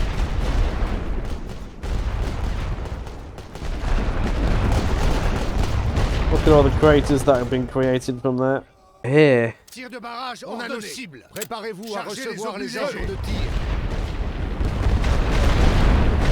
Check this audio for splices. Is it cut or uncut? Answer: cut